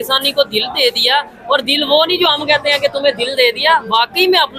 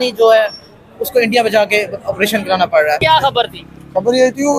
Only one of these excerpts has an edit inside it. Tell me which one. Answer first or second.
second